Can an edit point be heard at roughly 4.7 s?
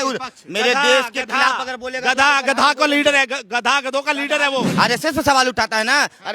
yes; 1 cut; at 4.7 s

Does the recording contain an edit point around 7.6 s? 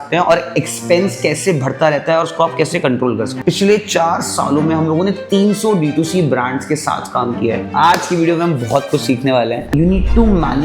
yes; 3 cuts; at 3.3 s, 7.6 s, 9.6 s

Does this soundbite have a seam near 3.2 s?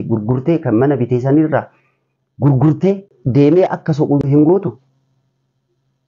yes; 2 cuts; at 3.2 s, 4.2 s

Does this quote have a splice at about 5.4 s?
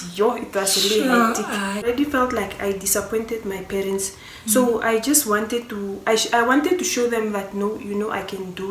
no; 1 cut; at 1.9 s

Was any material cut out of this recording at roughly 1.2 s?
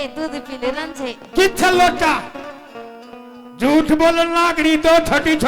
no; 0 cuts

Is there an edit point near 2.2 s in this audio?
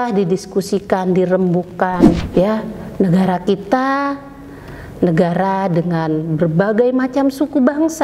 yes; 1 cut; at 2.2 s

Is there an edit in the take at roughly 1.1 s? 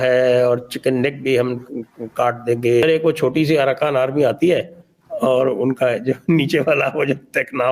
no; 1 cut; at 2.8 s

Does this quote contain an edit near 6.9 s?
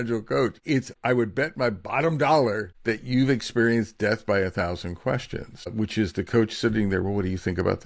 no; 3 cuts; at 0.9 s, 2.7 s, 5.7 s

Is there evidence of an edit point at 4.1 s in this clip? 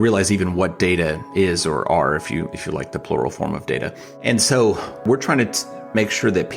yes; 2 cuts; at 4.1 s, 5.0 s

